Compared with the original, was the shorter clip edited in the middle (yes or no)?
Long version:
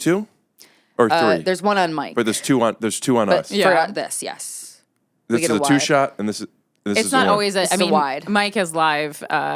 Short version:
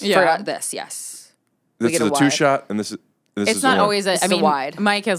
no